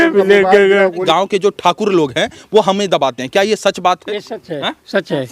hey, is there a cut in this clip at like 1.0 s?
yes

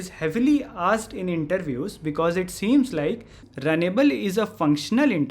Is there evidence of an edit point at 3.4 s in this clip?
yes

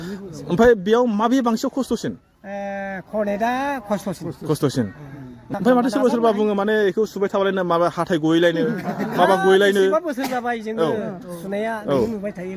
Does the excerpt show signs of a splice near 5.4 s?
yes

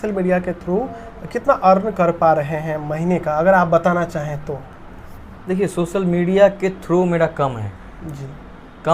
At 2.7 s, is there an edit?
no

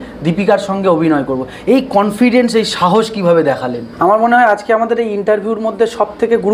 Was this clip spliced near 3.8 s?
yes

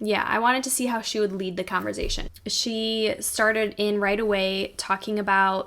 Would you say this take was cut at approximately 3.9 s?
no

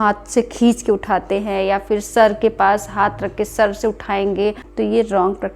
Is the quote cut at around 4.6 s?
yes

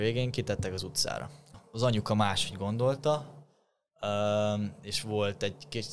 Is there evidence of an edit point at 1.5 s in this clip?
yes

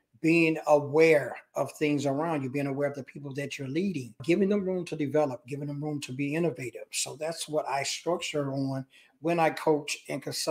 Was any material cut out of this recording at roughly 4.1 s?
yes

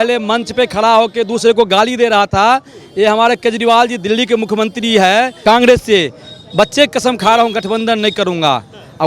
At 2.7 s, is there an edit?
no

